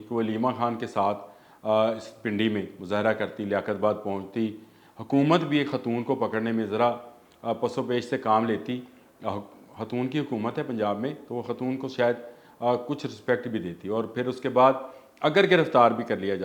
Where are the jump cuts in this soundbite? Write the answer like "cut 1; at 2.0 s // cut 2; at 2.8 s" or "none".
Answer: none